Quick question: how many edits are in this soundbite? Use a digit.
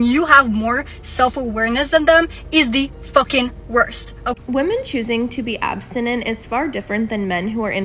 1